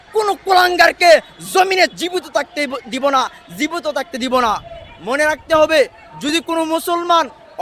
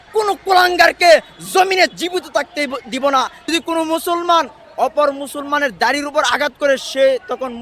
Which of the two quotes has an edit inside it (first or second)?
second